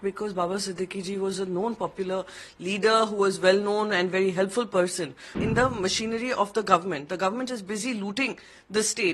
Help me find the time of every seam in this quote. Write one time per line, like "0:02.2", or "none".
0:05.4